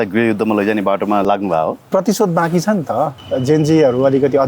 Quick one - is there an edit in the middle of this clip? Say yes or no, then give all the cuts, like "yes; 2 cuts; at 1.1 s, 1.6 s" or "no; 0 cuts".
yes; 2 cuts; at 1.2 s, 3.2 s